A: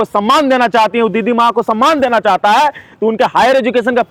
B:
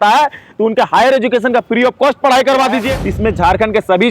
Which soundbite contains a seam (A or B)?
B